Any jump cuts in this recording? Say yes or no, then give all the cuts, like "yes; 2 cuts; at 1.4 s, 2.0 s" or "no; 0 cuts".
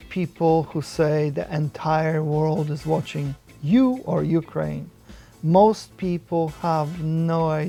no; 0 cuts